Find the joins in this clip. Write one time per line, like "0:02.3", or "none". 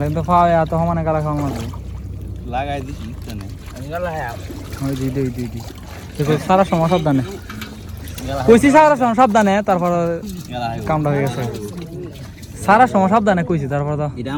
none